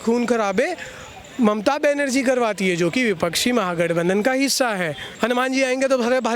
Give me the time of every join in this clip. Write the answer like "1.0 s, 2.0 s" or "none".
5.0 s